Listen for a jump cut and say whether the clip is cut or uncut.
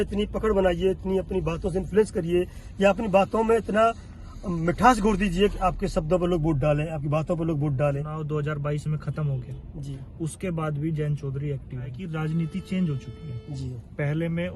cut